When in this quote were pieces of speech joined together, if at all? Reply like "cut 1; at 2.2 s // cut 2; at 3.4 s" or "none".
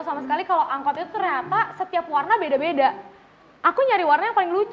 none